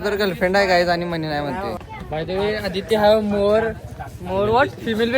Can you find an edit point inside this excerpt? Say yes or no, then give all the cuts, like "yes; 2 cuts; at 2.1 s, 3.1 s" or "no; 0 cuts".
yes; 1 cut; at 1.8 s